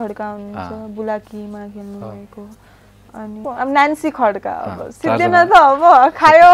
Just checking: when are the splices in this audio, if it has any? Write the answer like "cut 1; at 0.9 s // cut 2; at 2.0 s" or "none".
cut 1; at 3.4 s